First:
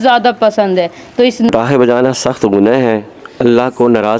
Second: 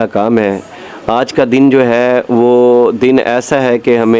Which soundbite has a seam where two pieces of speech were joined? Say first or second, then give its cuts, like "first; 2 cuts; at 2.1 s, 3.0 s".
first; 1 cut; at 1.5 s